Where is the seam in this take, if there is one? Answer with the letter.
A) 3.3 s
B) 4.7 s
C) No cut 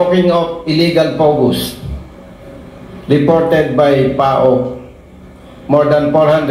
C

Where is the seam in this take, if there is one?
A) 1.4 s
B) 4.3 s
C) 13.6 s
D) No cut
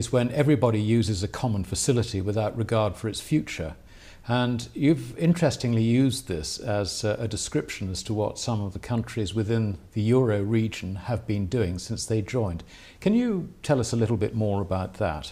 D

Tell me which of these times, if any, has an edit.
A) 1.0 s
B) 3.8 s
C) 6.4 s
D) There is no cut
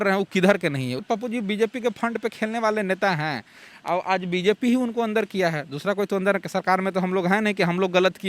A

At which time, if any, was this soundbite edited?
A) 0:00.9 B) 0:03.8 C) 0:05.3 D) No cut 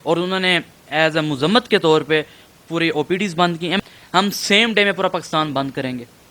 B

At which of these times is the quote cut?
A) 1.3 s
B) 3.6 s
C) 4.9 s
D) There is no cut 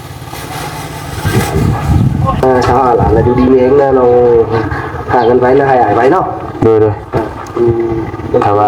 A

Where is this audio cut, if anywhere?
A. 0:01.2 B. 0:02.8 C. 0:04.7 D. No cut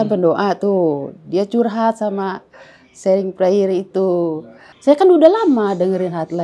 C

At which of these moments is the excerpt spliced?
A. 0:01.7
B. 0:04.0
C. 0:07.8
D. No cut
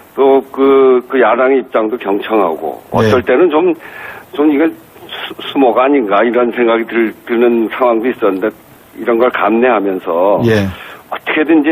A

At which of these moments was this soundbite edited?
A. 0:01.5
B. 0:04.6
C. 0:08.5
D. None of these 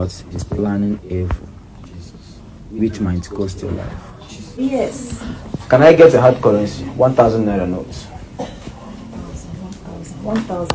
B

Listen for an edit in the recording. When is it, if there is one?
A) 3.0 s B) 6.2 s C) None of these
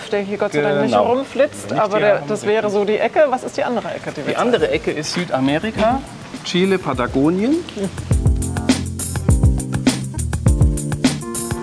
C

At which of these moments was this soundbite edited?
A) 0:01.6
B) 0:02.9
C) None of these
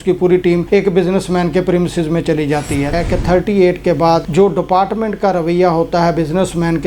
B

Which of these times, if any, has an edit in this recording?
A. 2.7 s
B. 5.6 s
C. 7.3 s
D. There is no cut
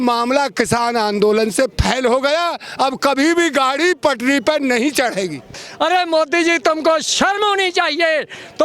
B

